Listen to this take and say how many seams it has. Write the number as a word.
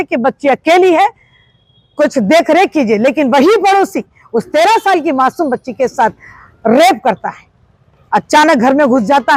zero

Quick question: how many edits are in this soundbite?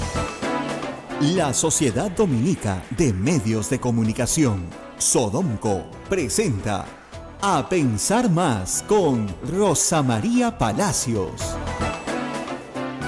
one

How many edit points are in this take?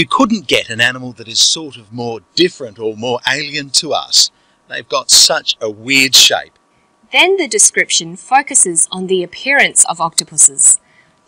zero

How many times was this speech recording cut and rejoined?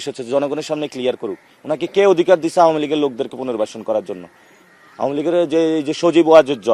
zero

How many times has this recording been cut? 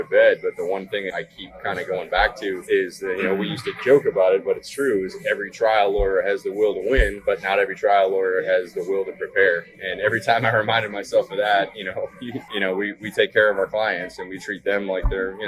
two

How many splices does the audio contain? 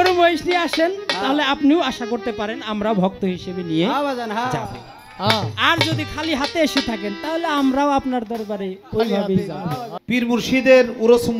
one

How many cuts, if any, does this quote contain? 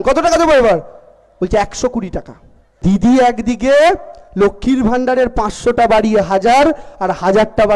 one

